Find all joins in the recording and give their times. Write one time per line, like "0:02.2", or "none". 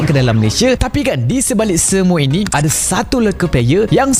none